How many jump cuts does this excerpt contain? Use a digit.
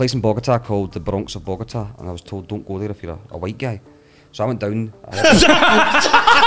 0